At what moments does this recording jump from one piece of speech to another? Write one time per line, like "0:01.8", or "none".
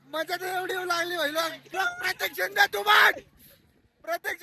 0:01.7